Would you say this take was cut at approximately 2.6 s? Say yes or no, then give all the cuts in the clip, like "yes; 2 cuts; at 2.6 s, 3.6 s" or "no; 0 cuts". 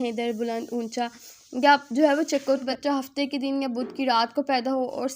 yes; 1 cut; at 2.6 s